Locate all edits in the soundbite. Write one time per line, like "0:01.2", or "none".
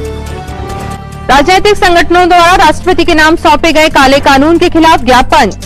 none